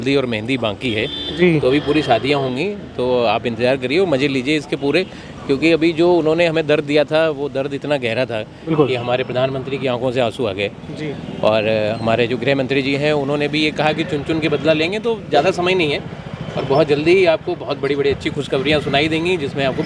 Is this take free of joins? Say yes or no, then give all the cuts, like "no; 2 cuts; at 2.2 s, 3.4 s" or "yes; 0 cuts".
yes; 0 cuts